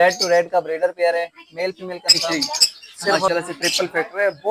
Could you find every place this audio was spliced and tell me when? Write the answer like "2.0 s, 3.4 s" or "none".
3.3 s